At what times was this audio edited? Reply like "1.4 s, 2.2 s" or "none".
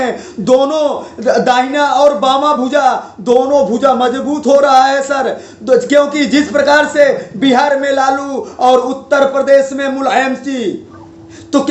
none